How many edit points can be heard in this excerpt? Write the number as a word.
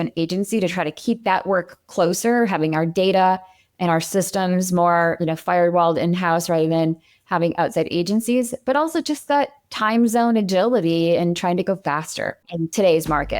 one